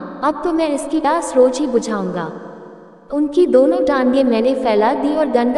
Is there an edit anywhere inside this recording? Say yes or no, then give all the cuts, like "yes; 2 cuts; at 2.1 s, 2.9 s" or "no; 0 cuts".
yes; 1 cut; at 1.1 s